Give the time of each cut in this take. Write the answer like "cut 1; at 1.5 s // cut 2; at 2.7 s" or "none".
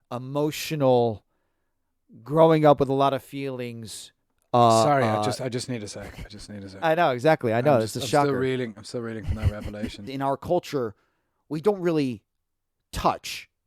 cut 1; at 10.1 s